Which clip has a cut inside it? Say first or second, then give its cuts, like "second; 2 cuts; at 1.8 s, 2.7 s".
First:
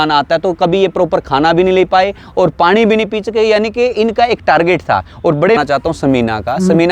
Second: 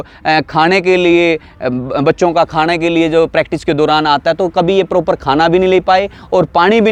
first; 1 cut; at 5.6 s